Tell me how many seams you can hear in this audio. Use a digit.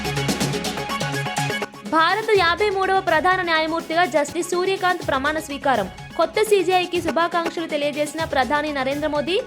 1